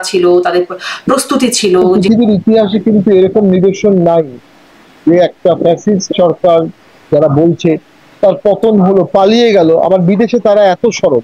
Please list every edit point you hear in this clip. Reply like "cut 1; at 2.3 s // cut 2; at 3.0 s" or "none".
cut 1; at 2.0 s